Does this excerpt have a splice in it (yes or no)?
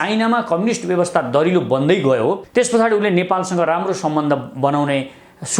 yes